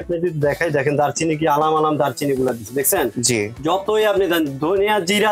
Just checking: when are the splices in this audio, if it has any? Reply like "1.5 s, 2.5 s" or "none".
none